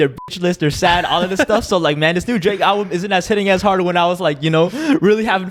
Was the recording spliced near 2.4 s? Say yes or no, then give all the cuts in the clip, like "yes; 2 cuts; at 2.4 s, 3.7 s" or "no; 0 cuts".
no; 0 cuts